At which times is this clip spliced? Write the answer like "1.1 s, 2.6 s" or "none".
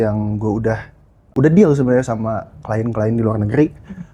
1.3 s